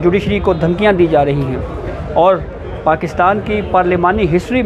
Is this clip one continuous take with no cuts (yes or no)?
yes